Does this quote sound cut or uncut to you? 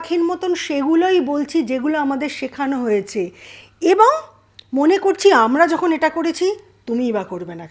uncut